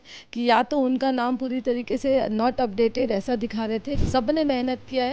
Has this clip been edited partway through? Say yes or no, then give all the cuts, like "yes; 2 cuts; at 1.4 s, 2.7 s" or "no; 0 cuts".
yes; 1 cut; at 3.9 s